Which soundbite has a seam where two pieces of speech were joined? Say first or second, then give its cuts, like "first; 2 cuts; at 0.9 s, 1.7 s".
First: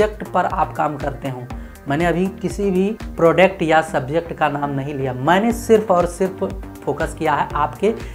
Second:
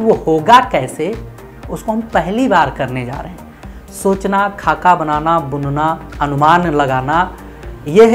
first; 1 cut; at 3.0 s